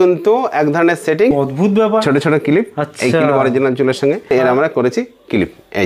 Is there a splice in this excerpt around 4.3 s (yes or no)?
yes